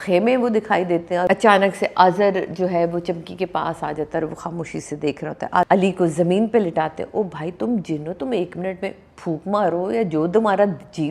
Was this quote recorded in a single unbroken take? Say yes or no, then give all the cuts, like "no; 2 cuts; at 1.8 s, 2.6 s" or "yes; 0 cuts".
no; 2 cuts; at 1.3 s, 5.7 s